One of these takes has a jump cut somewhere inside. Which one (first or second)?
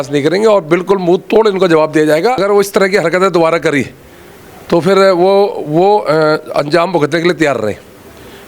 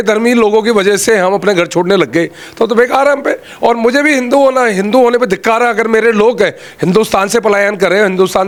first